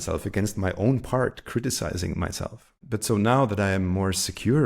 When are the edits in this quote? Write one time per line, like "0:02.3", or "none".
0:02.8